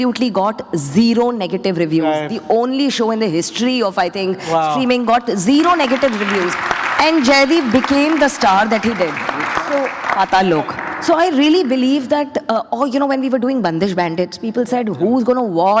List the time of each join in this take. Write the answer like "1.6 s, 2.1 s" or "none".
none